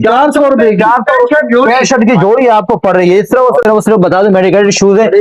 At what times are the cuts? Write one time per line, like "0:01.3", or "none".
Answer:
0:03.6